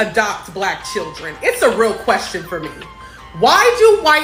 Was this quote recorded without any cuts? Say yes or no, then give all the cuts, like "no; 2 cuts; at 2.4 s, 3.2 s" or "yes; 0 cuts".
yes; 0 cuts